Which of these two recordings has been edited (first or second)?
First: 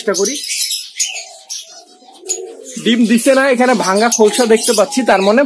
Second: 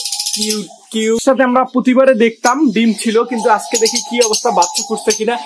second